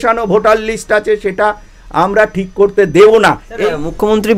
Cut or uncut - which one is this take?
cut